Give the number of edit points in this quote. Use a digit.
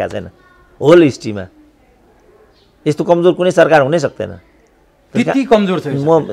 0